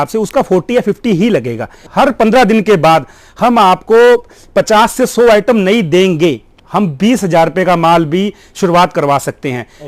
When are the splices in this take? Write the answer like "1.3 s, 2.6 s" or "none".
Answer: 1.8 s, 6.5 s